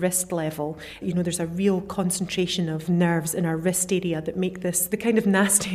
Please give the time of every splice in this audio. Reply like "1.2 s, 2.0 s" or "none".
1.0 s, 2.8 s, 4.8 s